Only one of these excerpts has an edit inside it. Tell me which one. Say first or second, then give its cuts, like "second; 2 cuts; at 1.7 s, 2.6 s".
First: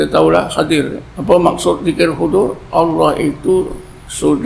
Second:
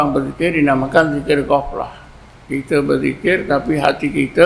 first; 1 cut; at 1.1 s